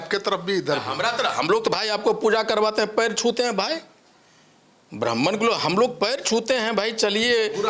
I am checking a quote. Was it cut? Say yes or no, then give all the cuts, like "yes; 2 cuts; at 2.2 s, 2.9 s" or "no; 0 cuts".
no; 0 cuts